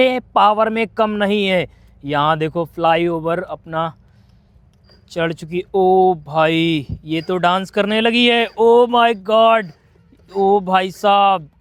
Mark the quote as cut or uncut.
uncut